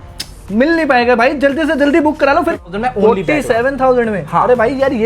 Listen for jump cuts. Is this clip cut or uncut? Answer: cut